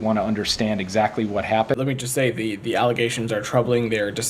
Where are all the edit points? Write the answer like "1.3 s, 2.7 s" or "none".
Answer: 1.8 s